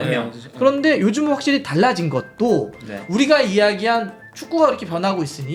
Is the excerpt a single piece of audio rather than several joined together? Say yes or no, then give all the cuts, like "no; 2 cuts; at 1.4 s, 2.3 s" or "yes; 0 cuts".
yes; 0 cuts